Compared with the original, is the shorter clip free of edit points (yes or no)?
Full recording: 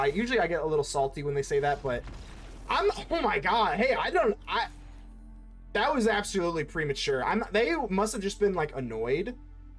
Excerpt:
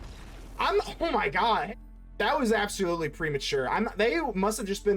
no